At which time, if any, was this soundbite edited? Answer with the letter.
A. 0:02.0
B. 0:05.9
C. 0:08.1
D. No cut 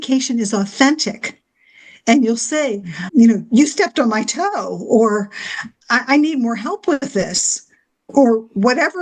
C